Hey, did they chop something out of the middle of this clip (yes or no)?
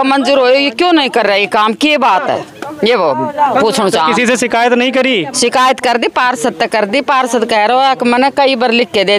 no